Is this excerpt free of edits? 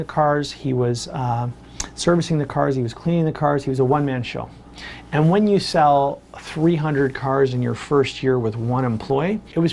yes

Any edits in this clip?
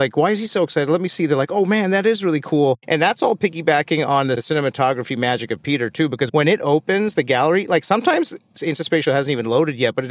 no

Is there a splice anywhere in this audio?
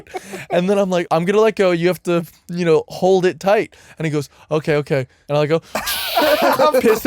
yes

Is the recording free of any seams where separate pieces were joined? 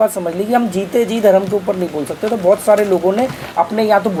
yes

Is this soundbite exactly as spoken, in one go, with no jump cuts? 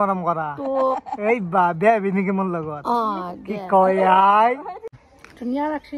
no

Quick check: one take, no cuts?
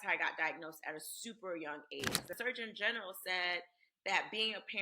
no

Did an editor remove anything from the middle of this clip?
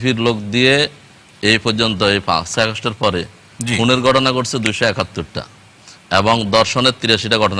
no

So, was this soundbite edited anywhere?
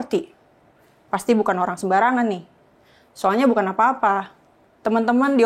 no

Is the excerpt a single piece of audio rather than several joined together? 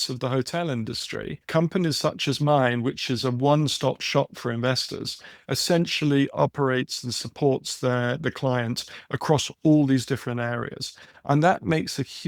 no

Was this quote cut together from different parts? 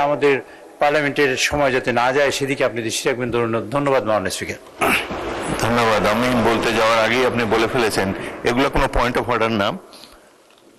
no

